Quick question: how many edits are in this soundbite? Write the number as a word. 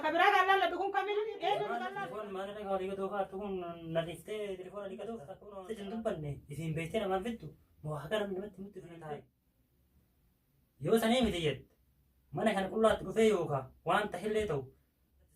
three